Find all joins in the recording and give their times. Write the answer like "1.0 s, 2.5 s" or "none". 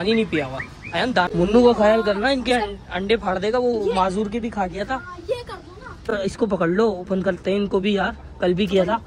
1.3 s, 6.1 s